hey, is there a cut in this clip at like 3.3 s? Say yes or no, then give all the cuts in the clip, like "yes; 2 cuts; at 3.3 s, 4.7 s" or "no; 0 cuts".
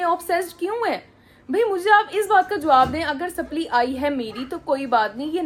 no; 0 cuts